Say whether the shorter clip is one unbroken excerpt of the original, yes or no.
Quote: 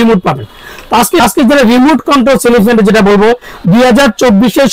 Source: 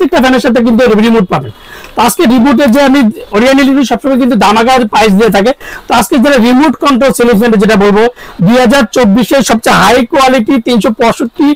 no